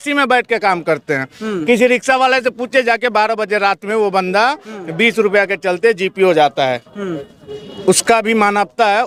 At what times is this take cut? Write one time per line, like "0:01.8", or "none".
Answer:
none